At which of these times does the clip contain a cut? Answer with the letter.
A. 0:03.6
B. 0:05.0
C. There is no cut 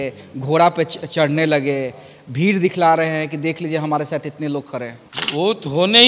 B